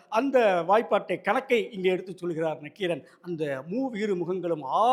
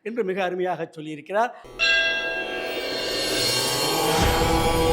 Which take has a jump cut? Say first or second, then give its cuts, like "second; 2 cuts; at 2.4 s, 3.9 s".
second; 1 cut; at 1.6 s